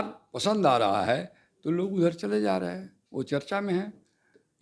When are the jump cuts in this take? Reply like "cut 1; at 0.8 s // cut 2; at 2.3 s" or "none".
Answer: none